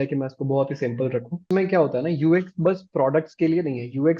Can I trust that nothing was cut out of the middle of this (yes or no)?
no